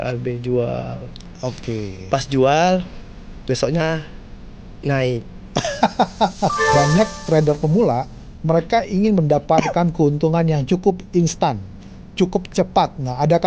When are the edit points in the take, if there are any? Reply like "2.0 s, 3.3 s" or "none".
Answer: 6.6 s